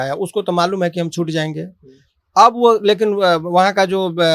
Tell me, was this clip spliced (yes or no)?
no